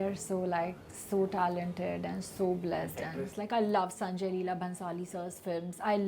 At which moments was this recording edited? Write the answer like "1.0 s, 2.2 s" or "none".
3.3 s